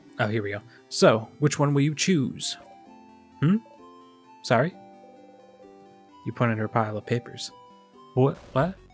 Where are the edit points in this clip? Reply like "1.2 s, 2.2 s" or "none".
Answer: none